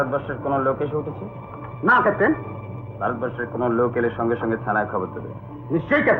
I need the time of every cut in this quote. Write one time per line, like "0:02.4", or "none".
none